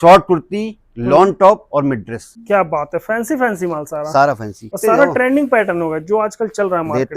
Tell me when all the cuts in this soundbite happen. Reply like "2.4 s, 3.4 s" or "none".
2.3 s, 4.8 s